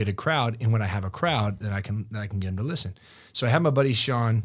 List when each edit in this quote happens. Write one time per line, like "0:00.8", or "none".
none